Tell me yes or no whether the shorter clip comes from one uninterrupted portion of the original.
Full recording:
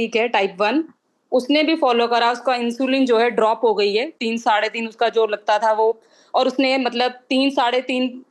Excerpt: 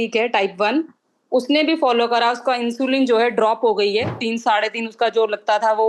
yes